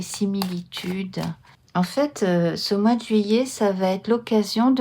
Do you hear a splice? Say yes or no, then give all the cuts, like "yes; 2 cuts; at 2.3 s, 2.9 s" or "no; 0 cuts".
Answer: yes; 1 cut; at 1.5 s